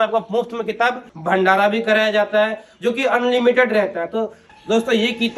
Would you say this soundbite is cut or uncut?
cut